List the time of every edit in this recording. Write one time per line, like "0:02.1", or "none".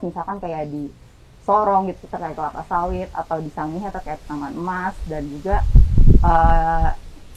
none